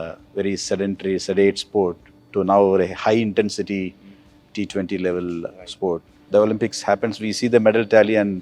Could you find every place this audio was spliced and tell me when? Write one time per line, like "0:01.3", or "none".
0:06.2